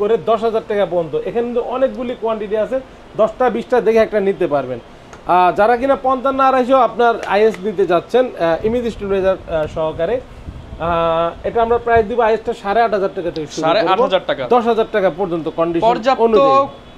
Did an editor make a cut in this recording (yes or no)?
no